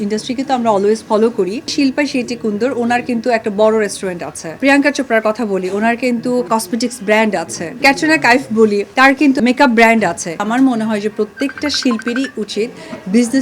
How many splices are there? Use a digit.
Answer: 6